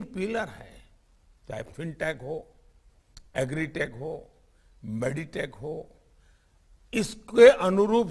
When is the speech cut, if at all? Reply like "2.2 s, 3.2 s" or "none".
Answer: 1.7 s